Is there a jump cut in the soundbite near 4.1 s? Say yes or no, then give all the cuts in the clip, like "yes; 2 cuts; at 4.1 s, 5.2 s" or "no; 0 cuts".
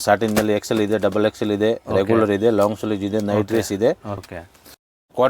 yes; 1 cut; at 4.1 s